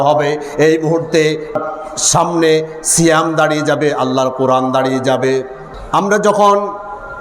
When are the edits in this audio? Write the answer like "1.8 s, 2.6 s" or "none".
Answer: 5.7 s